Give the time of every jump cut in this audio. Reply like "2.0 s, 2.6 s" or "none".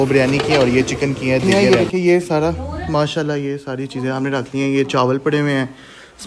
1.4 s